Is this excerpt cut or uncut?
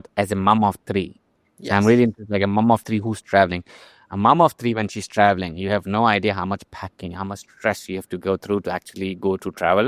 uncut